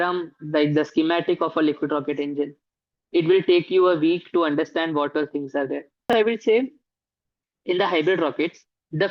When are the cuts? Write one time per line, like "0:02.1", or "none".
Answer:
0:06.1